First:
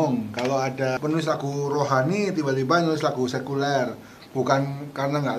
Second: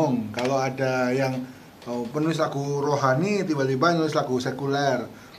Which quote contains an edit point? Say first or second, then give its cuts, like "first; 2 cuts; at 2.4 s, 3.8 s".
first; 1 cut; at 1.0 s